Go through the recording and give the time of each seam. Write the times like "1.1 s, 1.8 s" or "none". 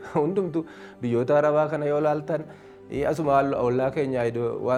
none